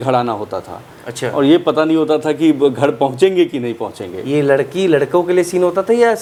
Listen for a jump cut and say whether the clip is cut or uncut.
uncut